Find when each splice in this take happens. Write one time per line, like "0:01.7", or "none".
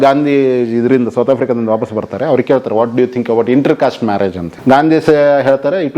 0:04.5